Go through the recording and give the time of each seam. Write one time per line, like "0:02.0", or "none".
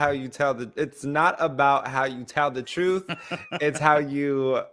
none

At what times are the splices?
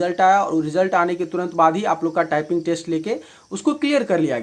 none

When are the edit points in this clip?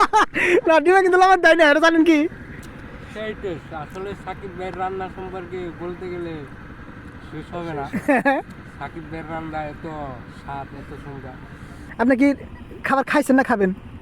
0:02.7
0:11.9

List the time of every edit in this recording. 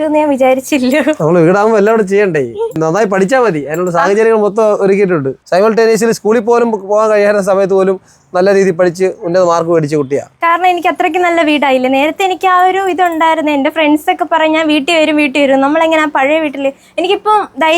0:02.8
0:05.4
0:10.3

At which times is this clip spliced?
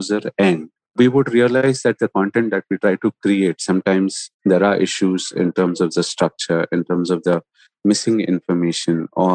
0:00.9
0:01.6
0:04.2

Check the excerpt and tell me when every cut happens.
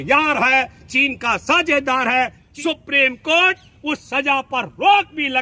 0:02.4

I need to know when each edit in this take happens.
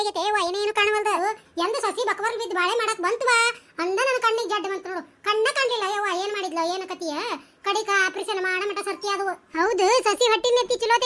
0:01.2
0:09.4

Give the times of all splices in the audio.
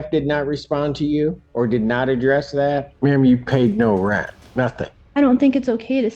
0:01.4
0:02.9
0:04.7

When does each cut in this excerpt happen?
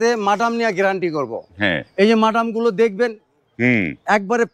none

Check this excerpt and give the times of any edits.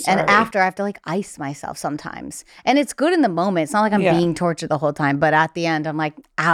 none

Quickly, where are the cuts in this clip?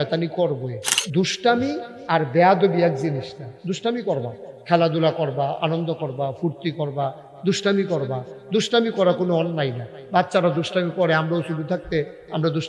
0:00.9

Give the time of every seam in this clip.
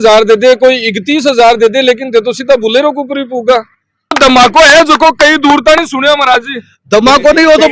0:04.2

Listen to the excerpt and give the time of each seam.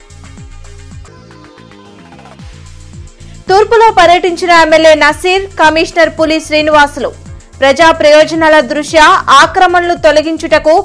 0:01.0
0:02.9

